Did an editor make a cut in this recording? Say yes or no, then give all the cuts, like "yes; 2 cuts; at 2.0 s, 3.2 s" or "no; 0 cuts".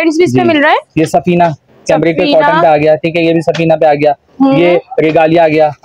no; 0 cuts